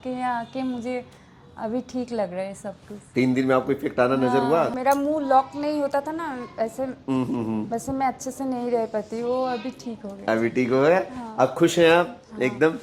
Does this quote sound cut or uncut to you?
cut